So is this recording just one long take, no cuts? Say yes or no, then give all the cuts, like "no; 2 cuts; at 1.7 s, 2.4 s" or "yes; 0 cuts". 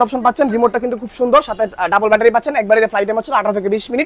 yes; 0 cuts